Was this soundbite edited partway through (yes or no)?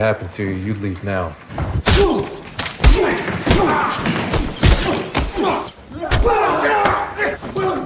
no